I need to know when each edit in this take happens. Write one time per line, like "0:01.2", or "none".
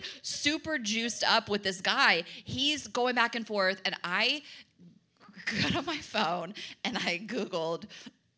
none

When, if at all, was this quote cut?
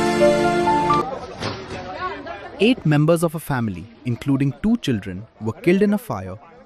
0:01.0

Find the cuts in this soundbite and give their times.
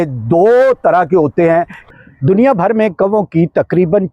0:01.8

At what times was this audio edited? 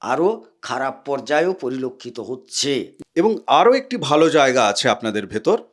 0:02.9

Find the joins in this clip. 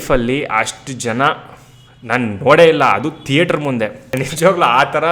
0:04.0

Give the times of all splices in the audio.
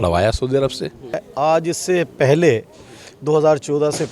0:01.2

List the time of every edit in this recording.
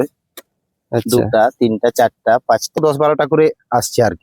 0:02.8

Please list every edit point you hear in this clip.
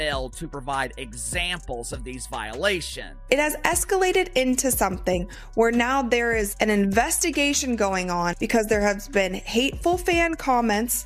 0:03.2
0:08.4

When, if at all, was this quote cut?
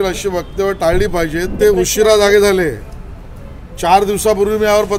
0:01.5

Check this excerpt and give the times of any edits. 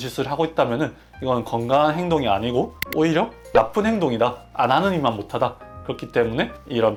none

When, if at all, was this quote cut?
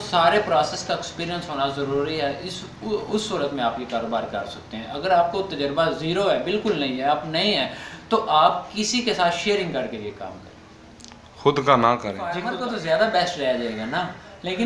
0:12.5

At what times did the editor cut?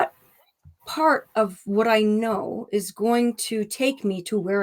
none

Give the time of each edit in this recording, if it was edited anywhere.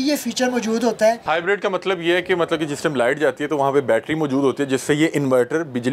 0:01.2

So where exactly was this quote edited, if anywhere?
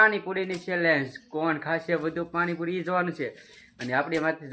0:01.4

